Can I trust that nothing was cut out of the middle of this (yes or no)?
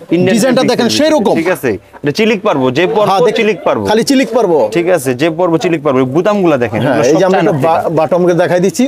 yes